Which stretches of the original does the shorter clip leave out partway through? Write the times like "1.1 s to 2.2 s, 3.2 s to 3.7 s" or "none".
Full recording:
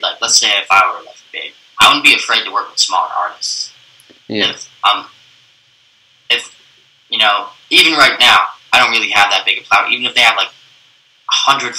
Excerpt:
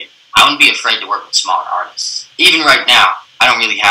3.7 s to 7.6 s